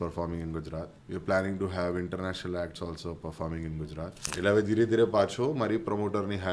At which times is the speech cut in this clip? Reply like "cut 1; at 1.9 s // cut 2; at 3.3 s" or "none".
cut 1; at 1.0 s // cut 2; at 4.3 s